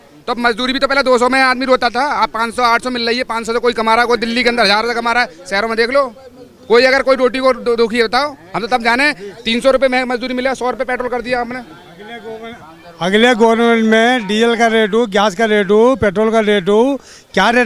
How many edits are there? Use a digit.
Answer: 0